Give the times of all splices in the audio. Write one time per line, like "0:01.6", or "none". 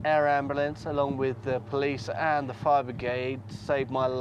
none